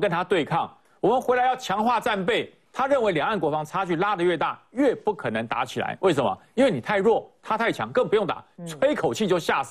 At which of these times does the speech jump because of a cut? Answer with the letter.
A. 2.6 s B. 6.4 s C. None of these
A